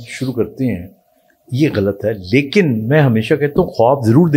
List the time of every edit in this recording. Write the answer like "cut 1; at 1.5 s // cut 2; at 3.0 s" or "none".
none